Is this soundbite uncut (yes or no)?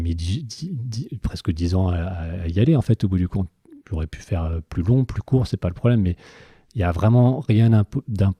yes